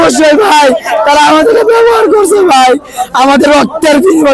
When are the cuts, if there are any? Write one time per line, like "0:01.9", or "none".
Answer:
none